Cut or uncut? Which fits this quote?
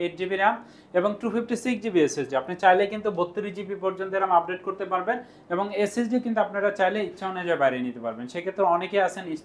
uncut